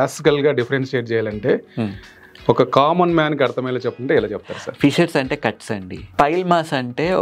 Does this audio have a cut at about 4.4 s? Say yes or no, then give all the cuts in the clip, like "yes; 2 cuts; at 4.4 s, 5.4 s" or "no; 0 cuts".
no; 1 cut; at 6.0 s